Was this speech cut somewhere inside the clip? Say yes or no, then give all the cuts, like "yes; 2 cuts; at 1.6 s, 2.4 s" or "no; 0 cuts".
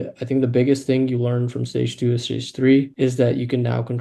yes; 1 cut; at 2.9 s